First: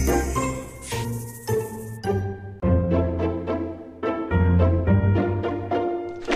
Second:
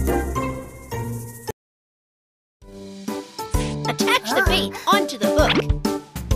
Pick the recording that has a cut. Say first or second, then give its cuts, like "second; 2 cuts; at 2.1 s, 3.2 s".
first; 1 cut; at 1.4 s